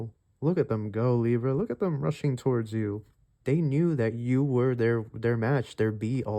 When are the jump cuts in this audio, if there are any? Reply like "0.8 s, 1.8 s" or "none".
3.2 s